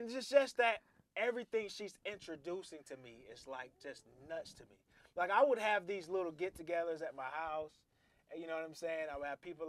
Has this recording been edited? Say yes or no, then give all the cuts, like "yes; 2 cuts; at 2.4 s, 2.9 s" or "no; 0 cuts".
no; 0 cuts